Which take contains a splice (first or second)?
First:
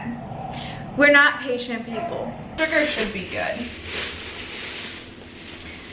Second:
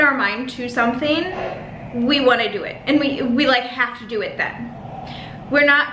first